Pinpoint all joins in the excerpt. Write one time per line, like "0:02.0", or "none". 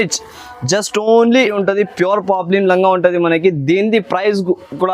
0:01.5